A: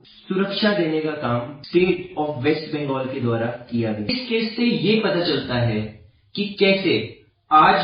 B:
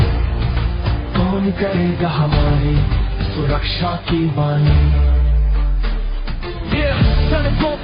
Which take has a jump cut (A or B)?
A